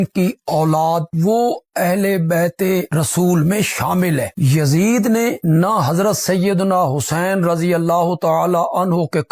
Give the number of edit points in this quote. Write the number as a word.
one